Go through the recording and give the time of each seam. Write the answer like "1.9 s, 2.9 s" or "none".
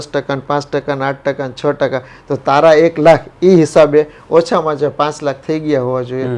none

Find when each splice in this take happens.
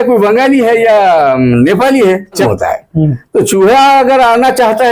2.4 s

